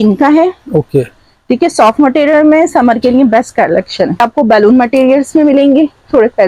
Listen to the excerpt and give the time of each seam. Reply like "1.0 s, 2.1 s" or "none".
4.2 s